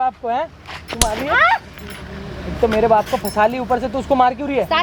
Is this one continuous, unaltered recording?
yes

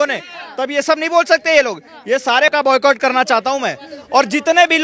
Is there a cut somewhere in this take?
no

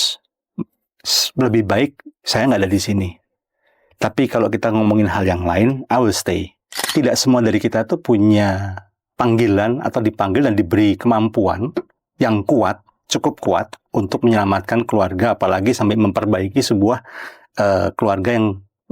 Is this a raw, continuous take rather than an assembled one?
no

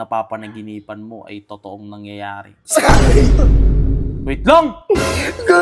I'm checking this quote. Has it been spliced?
no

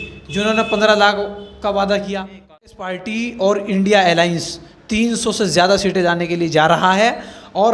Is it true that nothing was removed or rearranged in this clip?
no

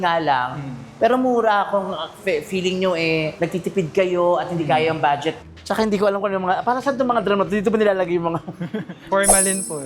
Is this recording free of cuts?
no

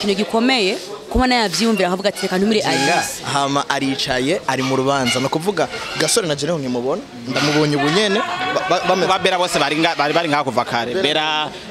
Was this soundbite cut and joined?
yes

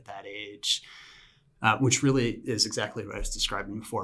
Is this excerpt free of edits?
yes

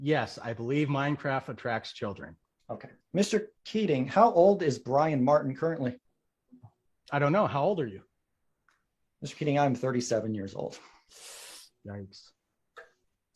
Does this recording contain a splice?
yes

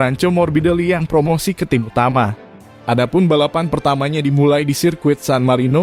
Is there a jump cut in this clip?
no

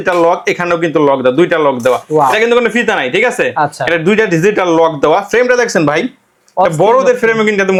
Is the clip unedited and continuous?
yes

